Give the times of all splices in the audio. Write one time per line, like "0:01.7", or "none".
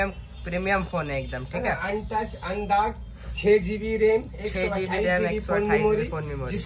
none